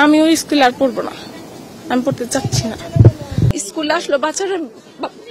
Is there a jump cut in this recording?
yes; 1 cut; at 3.5 s

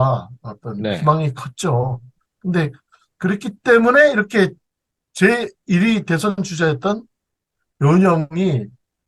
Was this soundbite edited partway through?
no; 0 cuts

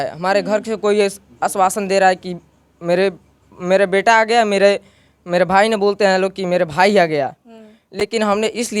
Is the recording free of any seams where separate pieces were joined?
yes; 0 cuts

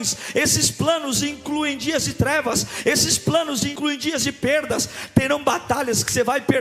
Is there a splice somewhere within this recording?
yes; 1 cut; at 3.8 s

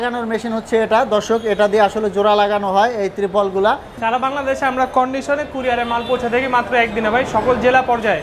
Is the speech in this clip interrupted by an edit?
yes; 1 cut; at 3.9 s

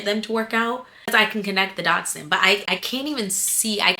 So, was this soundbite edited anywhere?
yes; 1 cut; at 1.1 s

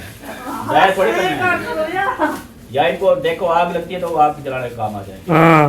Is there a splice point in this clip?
no; 0 cuts

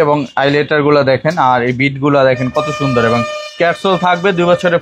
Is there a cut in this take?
no; 0 cuts

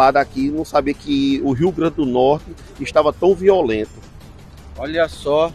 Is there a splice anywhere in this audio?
no; 0 cuts

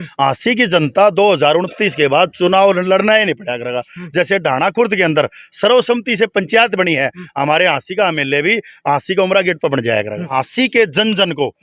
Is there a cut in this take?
yes; 1 cut; at 10.3 s

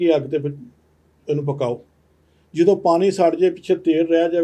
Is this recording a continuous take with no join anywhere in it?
yes; 0 cuts

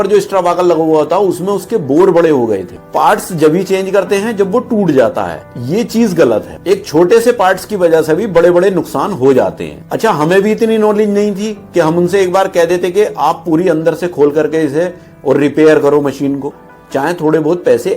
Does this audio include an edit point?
yes; 2 cuts; at 2.8 s, 16.5 s

